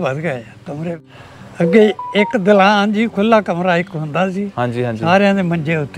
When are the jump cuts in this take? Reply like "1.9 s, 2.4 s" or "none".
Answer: 1.0 s